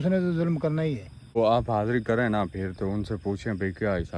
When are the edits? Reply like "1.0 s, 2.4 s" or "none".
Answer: 1.4 s